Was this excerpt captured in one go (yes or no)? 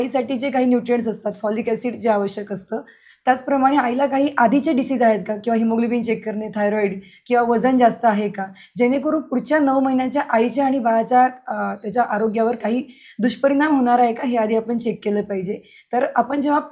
yes